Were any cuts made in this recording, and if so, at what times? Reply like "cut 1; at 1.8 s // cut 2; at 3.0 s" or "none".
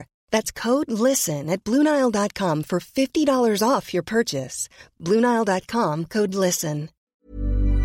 cut 1; at 6.9 s

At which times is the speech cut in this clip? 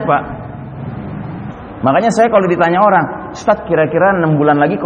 cut 1; at 1.5 s

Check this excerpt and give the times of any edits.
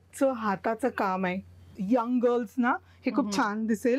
cut 1; at 1.7 s

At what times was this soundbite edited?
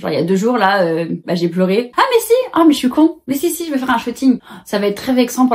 cut 1; at 1.9 s // cut 2; at 4.4 s

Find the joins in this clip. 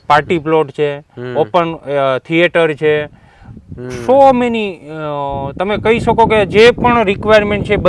none

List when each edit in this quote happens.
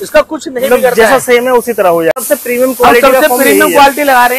cut 1; at 2.1 s

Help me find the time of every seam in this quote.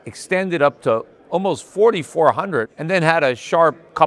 cut 1; at 2.8 s

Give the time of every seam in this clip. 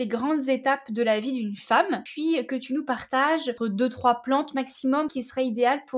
cut 1; at 2.1 s // cut 2; at 3.6 s // cut 3; at 5.1 s

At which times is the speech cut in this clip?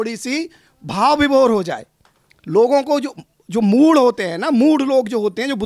none

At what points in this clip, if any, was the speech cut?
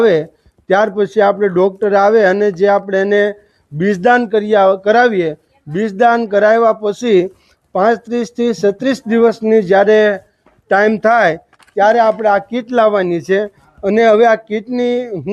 none

